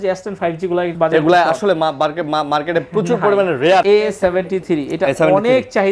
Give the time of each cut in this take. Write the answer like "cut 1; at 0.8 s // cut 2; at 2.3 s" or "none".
cut 1; at 0.9 s // cut 2; at 3.8 s